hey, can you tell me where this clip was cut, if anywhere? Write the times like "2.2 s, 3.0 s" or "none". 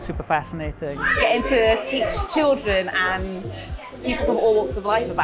1.0 s